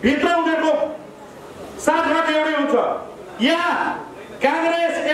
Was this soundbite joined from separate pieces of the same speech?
no; 0 cuts

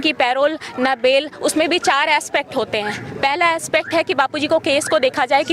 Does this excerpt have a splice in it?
no; 0 cuts

